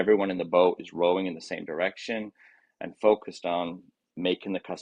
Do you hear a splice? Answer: no; 0 cuts

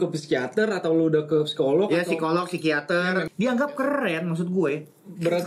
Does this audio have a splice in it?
yes; 1 cut; at 3.3 s

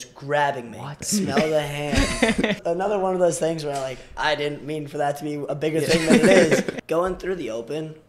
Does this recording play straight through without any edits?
no; 3 cuts; at 1.1 s, 2.6 s, 6.8 s

